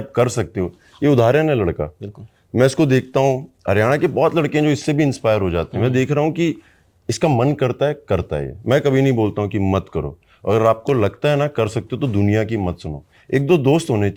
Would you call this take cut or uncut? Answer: uncut